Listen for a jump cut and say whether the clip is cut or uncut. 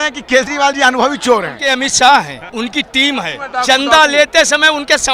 cut